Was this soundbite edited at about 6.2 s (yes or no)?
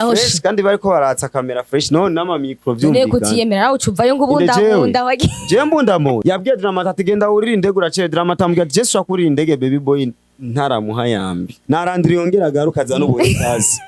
yes